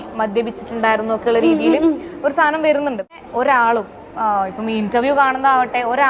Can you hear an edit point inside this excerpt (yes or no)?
yes